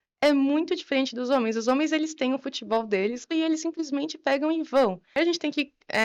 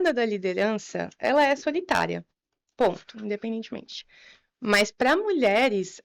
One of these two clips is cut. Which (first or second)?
first